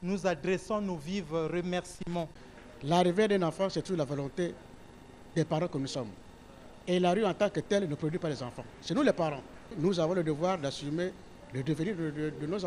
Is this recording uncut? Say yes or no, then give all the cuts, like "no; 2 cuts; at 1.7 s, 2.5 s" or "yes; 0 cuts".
no; 2 cuts; at 2.4 s, 9.8 s